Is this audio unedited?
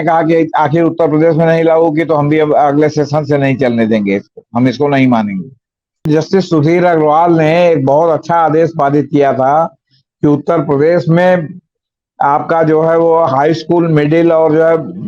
no; 1 cut; at 6.0 s

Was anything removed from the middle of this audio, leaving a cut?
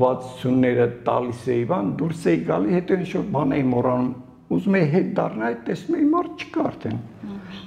no; 0 cuts

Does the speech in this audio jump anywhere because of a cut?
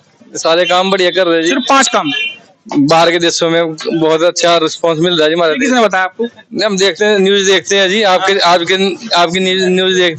no; 0 cuts

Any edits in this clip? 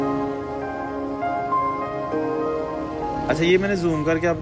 no; 0 cuts

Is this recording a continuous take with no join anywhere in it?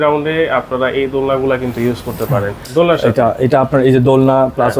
no; 1 cut; at 2.6 s

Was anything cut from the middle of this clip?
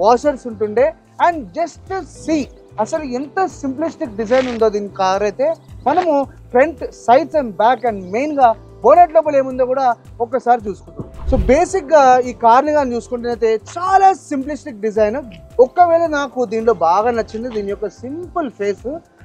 no; 0 cuts

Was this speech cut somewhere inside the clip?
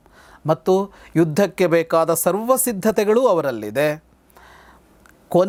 no; 0 cuts

